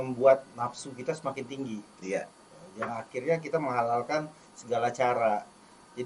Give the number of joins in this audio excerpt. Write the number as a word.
zero